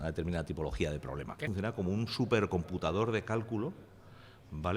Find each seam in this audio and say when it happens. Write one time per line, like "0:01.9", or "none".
0:01.5

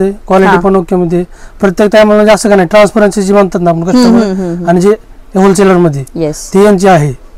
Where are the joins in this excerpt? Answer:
none

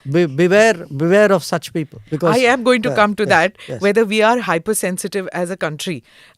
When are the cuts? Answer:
none

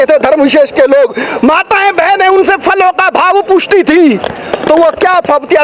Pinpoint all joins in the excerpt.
none

